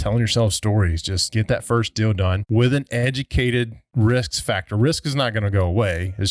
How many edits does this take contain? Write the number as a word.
three